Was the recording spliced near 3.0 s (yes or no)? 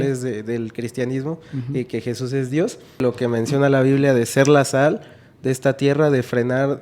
yes